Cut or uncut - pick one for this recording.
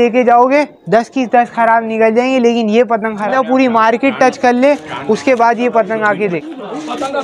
cut